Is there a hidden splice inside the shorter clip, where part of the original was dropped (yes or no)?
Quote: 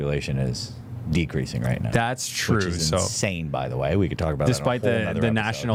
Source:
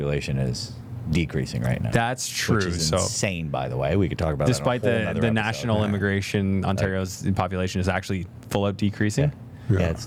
no